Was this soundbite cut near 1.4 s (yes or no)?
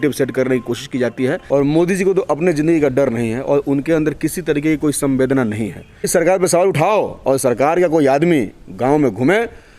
yes